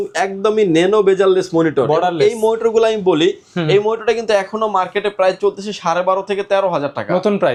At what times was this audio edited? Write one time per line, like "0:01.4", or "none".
none

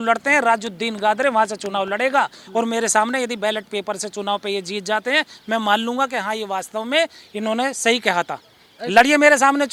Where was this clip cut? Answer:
none

